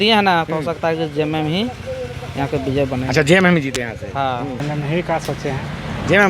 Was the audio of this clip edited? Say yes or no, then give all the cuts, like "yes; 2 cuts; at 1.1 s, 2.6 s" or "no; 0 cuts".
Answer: yes; 1 cut; at 4.6 s